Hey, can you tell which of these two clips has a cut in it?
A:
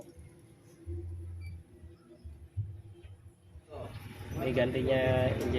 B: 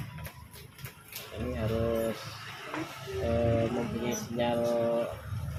A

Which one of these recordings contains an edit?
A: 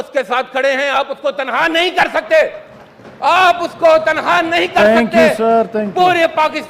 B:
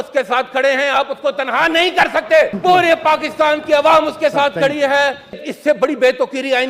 B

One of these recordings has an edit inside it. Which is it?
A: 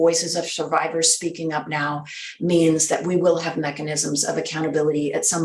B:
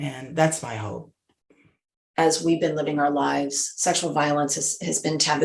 B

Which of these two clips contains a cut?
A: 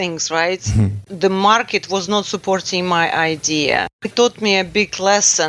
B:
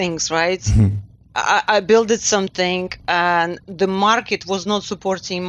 A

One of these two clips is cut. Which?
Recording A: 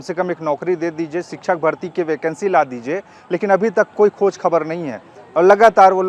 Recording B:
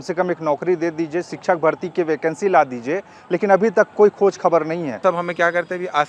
B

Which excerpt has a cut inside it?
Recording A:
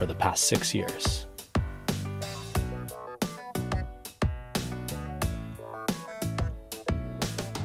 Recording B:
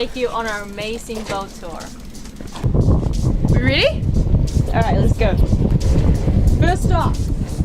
B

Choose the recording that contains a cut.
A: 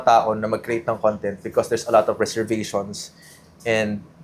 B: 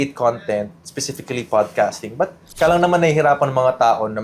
B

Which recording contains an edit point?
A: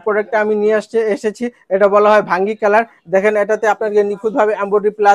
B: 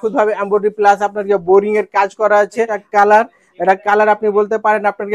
B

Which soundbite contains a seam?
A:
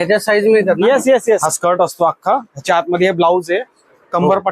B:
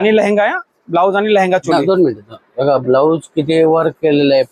A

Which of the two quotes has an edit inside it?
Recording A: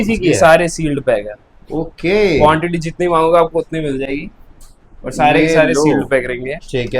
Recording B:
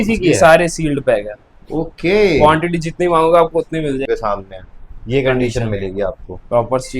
B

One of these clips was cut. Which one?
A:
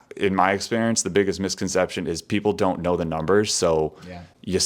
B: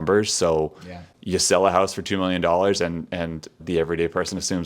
B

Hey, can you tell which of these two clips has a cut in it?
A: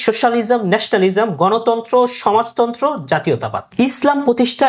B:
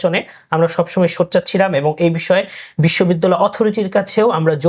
A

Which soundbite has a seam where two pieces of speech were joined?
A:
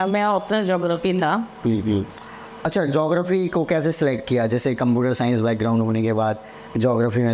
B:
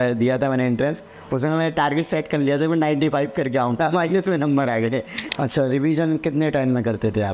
B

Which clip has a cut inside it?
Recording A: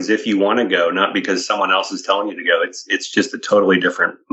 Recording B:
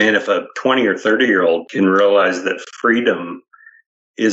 B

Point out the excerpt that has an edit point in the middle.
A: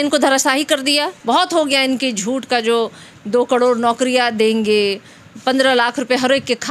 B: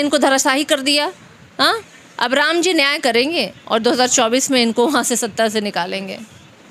A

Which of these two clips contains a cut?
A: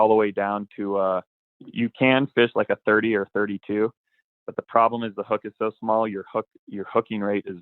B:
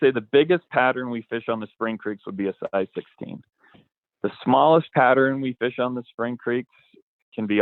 A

